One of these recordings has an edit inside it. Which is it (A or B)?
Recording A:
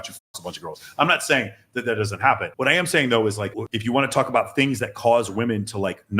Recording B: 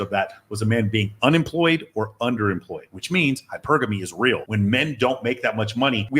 A